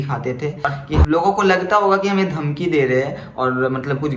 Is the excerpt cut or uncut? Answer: cut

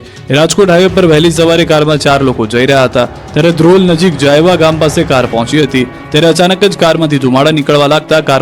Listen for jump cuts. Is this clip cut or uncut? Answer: cut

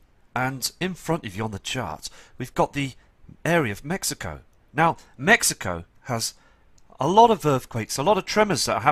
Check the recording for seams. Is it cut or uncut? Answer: uncut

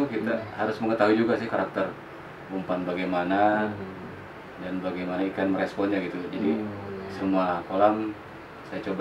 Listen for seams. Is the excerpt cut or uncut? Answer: uncut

